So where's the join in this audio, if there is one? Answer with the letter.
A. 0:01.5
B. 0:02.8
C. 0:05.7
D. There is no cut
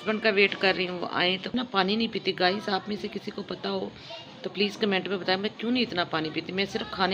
A